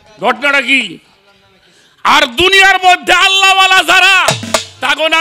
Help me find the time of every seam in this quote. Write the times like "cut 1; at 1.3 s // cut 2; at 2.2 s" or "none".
none